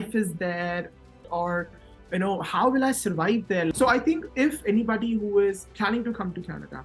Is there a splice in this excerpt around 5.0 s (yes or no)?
no